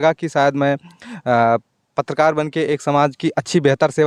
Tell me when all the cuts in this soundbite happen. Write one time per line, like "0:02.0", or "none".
none